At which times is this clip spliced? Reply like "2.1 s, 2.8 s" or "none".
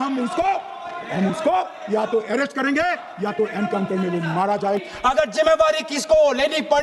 4.8 s